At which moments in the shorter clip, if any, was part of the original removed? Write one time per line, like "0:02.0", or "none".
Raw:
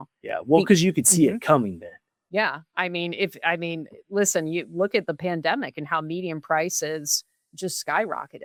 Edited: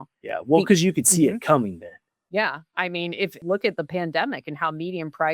0:03.4